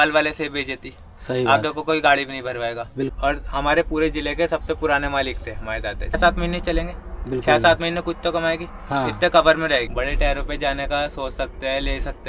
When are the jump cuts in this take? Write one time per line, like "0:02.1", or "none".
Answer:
0:03.1
0:06.2
0:09.9